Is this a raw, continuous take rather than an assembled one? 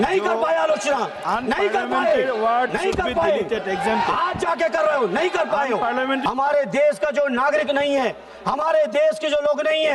no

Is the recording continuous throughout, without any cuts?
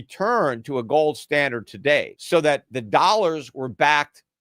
no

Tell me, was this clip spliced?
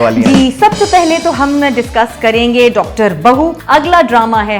yes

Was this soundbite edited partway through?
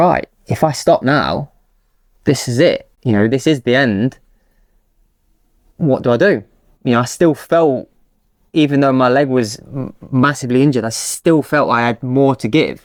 no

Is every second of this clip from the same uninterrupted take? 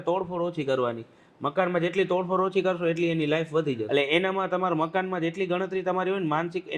no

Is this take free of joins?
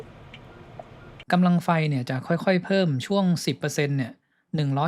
no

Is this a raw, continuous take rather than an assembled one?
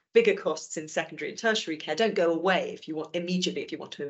yes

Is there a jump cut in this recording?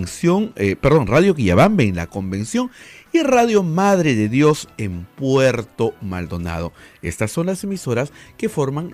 no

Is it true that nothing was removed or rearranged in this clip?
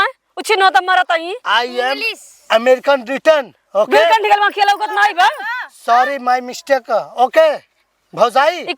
yes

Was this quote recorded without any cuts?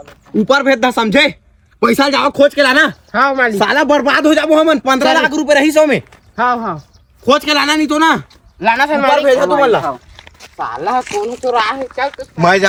yes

